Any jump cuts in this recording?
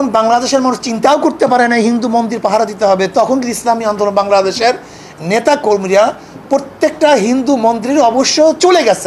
no; 0 cuts

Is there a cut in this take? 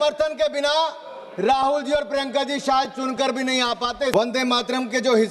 yes; 1 cut; at 4.1 s

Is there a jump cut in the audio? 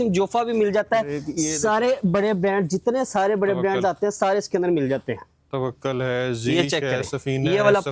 no; 0 cuts

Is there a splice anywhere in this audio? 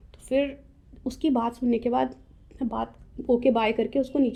no; 0 cuts

